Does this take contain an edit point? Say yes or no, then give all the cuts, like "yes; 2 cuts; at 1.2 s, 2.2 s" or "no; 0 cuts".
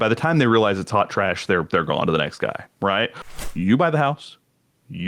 yes; 1 cut; at 3.2 s